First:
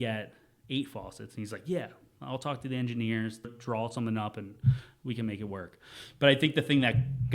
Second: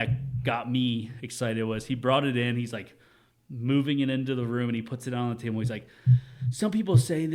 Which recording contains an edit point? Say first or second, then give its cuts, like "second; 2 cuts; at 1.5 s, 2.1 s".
first; 1 cut; at 3.4 s